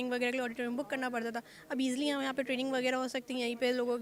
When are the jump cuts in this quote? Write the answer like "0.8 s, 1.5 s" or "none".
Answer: none